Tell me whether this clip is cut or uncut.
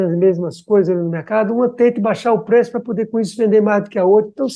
uncut